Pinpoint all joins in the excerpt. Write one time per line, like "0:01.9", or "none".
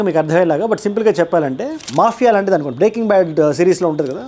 0:01.8